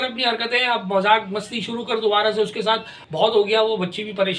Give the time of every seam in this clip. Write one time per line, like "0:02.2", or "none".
0:03.0